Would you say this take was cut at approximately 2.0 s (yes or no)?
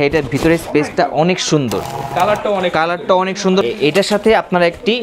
yes